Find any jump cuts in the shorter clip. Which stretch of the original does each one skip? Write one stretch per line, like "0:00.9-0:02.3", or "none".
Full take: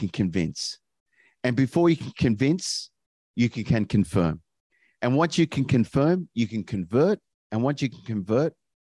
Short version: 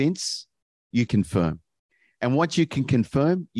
0:03.5-0:03.9

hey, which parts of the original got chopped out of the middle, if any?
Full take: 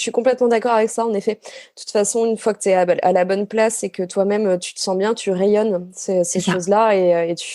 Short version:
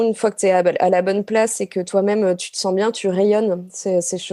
none

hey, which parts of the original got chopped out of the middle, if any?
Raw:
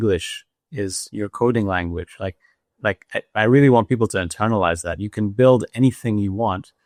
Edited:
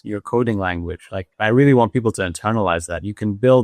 0:02.4-0:03.3

